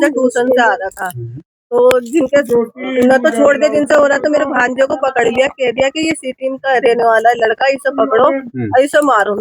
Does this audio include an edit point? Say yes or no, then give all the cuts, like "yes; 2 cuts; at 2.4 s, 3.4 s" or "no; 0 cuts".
no; 0 cuts